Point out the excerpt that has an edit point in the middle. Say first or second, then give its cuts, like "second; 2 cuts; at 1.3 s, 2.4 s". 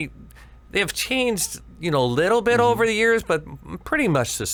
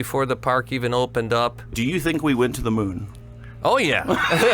second; 1 cut; at 1.6 s